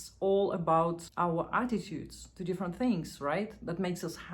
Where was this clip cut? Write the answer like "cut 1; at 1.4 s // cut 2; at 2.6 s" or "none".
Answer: cut 1; at 1.0 s